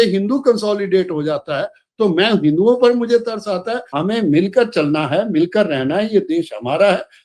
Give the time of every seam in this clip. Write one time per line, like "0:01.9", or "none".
0:03.8